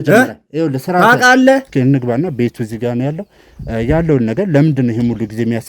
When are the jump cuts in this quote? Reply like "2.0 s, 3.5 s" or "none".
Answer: 1.7 s